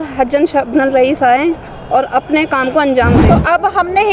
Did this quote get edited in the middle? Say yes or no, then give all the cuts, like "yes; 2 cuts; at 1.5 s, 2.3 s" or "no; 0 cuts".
yes; 1 cut; at 3.2 s